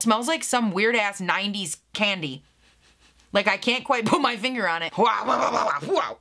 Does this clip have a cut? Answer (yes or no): yes